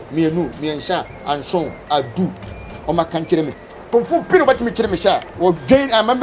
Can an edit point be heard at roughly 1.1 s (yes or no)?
no